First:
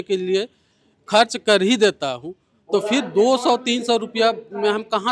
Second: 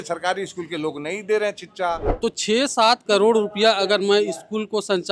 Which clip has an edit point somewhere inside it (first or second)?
second